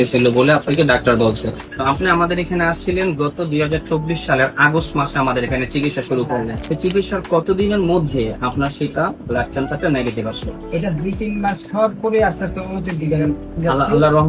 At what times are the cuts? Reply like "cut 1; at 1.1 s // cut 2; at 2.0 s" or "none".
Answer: cut 1; at 1.7 s // cut 2; at 6.6 s